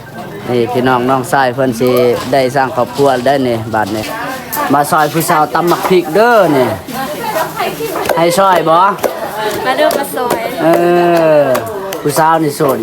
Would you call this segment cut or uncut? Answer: cut